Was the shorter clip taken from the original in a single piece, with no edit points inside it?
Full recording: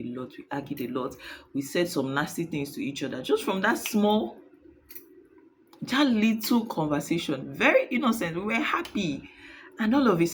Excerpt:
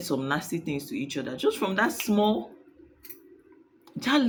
yes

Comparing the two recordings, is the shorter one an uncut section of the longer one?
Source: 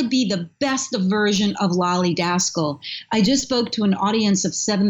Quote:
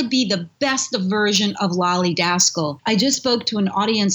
no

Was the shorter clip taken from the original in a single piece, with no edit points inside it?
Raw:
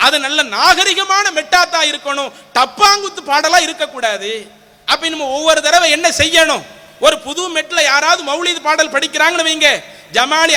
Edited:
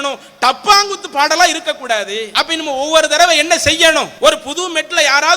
no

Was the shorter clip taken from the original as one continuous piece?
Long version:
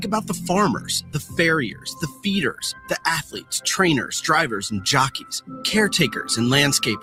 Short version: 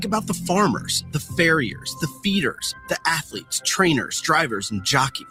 yes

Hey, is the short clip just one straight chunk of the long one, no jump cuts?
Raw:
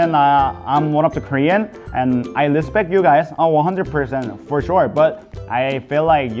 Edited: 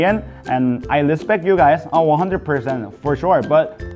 yes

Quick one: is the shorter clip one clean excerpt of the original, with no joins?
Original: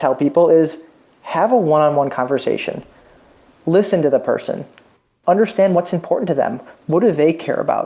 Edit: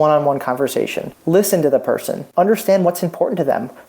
no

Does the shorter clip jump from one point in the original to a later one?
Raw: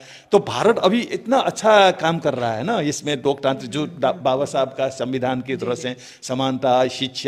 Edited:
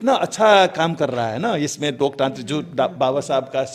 no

